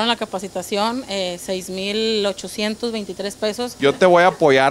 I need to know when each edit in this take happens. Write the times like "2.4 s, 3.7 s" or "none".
3.7 s